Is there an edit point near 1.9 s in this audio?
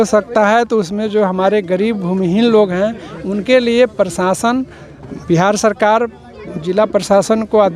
no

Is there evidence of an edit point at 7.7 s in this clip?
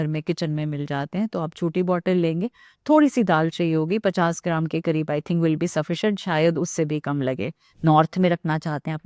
yes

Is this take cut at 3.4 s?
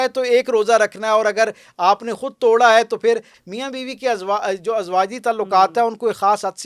yes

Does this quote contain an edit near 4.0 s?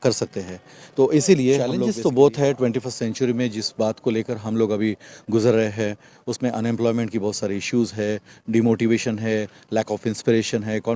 no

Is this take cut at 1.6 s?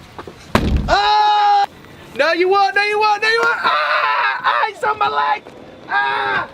yes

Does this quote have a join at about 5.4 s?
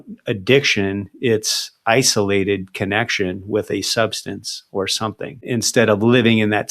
yes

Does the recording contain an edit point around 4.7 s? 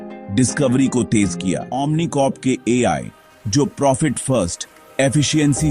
no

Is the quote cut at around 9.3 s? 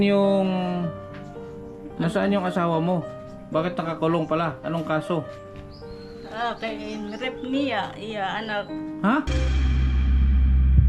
yes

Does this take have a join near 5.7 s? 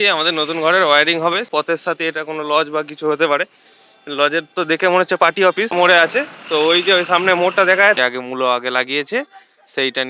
yes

